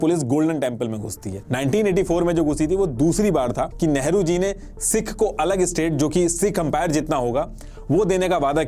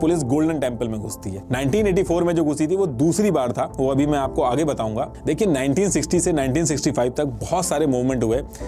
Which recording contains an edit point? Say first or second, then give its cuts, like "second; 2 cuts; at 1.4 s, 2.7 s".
first; 1 cut; at 3.7 s